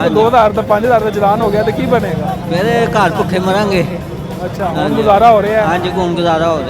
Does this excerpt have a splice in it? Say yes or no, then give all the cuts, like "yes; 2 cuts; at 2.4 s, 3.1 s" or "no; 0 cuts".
no; 0 cuts